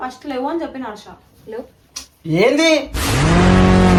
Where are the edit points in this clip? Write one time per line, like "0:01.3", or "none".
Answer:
none